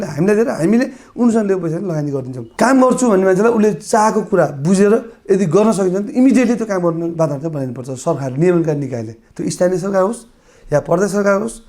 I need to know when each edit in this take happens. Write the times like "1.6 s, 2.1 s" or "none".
2.4 s